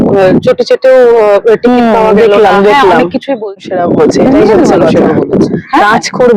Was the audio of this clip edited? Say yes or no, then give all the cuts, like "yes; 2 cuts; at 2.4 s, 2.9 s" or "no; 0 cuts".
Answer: yes; 1 cut; at 3.5 s